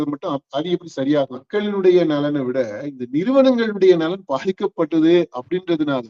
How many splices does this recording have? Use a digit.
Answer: 1